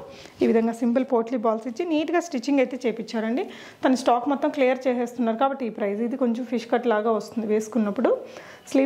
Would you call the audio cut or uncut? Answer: uncut